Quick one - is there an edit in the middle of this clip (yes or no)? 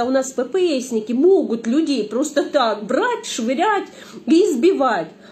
no